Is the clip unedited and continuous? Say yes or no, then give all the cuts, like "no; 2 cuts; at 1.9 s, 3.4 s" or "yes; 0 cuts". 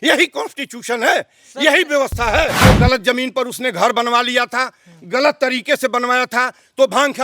no; 1 cut; at 2.6 s